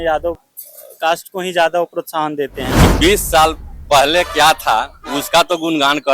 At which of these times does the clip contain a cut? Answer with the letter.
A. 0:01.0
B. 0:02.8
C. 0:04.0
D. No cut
B